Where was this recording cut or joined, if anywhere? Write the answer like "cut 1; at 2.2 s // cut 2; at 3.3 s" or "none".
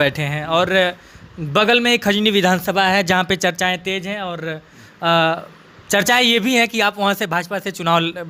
none